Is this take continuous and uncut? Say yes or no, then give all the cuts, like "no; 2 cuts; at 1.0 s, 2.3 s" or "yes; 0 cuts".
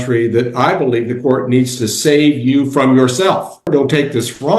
no; 1 cut; at 3.7 s